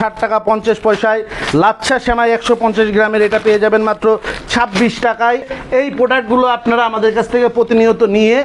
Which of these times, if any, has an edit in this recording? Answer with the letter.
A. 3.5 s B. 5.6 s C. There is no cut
B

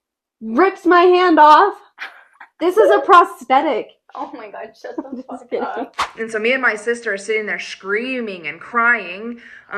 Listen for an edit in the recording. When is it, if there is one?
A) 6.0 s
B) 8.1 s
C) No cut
A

